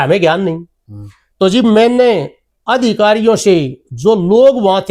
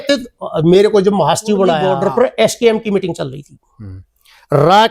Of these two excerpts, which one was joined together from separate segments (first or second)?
second